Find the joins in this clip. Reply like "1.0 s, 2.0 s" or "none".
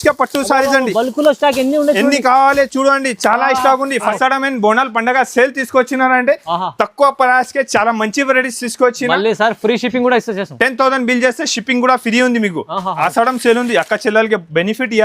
4.1 s, 12.9 s

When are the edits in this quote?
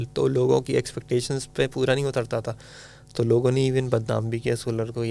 none

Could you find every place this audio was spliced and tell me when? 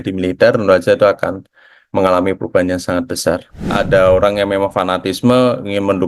3.6 s

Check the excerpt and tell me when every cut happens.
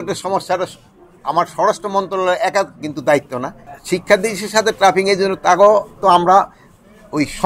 3.7 s

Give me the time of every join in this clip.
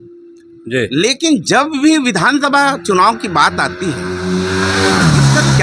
none

